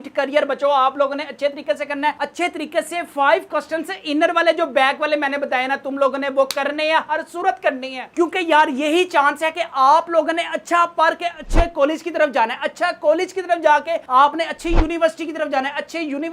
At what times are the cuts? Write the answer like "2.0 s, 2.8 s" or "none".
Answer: none